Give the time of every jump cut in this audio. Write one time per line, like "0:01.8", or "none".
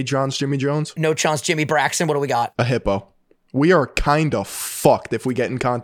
0:00.9
0:02.5